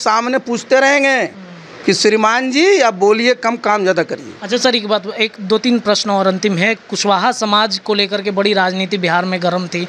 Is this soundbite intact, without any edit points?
yes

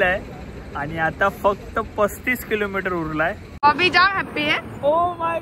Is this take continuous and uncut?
no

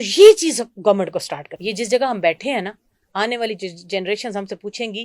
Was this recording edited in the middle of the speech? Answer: yes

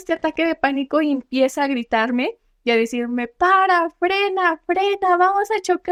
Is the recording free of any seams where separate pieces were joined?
yes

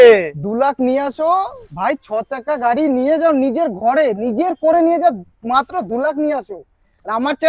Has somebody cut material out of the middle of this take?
no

